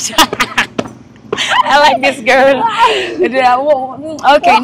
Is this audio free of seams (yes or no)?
yes